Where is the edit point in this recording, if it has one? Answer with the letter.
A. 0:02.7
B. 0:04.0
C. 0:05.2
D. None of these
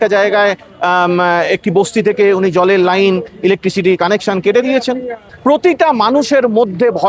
C